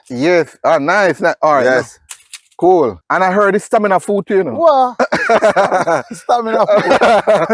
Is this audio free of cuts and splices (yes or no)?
no